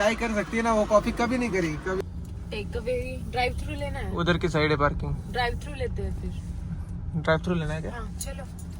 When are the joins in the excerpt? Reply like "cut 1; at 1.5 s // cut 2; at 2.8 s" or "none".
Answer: cut 1; at 2.0 s